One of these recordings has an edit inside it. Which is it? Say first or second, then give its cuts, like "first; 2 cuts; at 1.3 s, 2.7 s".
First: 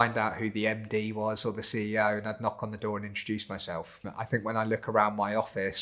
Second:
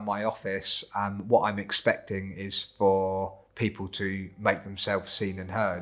first; 1 cut; at 4.1 s